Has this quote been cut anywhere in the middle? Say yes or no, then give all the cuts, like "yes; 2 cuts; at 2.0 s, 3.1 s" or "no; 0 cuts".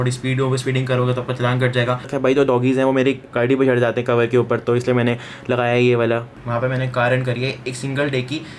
yes; 2 cuts; at 2.1 s, 6.4 s